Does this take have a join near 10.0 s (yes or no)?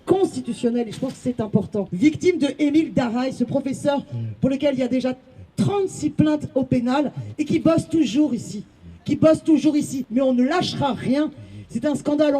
yes